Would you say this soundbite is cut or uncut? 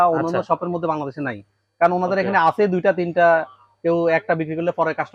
uncut